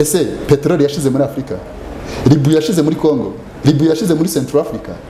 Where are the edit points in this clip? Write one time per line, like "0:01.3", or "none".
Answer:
none